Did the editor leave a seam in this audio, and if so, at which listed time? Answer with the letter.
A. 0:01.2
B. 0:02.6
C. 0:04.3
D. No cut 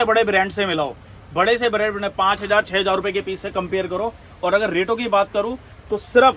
D